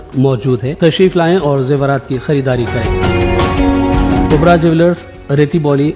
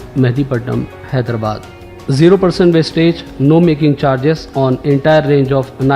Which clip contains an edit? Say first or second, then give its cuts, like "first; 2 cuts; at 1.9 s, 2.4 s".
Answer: first; 1 cut; at 4.3 s